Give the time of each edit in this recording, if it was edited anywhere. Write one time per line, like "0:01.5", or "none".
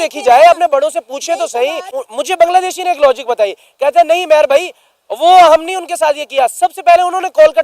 0:01.9